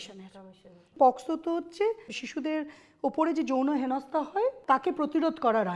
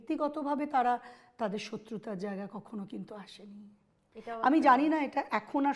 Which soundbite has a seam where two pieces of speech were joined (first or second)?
first